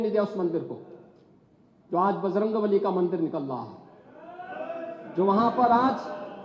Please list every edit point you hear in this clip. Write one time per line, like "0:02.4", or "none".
none

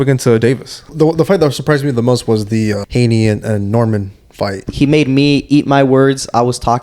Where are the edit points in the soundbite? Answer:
0:00.9
0:02.8
0:04.7

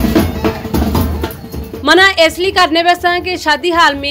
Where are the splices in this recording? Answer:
none

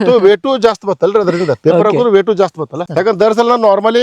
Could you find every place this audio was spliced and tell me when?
0:02.8

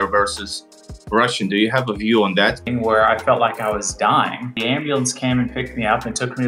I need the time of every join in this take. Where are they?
0:02.6
0:04.6

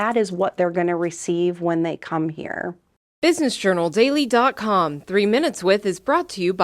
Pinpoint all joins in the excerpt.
0:02.8

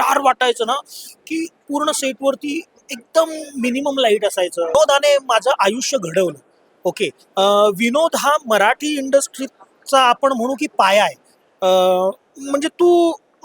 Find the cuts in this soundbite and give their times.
0:04.7

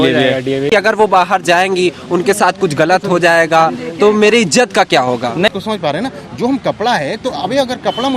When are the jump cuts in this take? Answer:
0:00.7
0:05.5

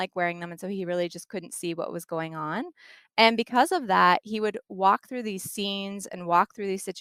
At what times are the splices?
none

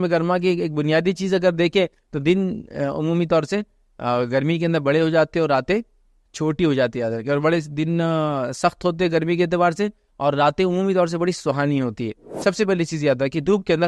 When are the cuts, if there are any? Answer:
0:12.3

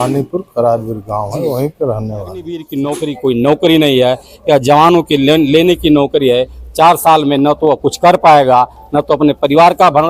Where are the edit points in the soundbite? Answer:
0:02.6

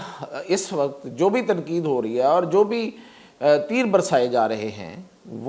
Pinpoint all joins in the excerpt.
none

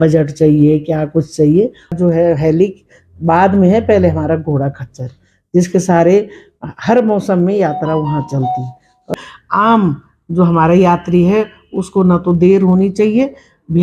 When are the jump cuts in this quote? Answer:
0:02.0
0:09.2

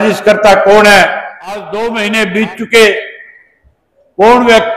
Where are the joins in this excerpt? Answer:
0:01.6

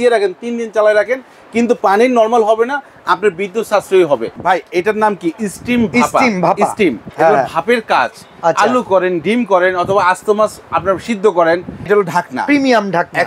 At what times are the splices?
0:04.4
0:11.9

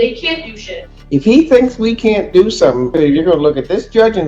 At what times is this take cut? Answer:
0:00.9
0:02.9

